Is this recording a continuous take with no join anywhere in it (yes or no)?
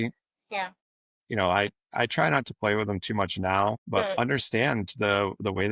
no